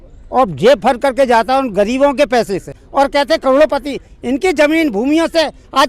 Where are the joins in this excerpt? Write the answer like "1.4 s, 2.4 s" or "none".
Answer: 2.8 s